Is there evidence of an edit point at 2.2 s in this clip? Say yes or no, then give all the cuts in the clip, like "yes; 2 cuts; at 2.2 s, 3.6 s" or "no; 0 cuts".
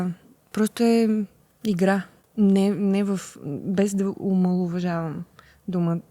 yes; 2 cuts; at 1.4 s, 2.2 s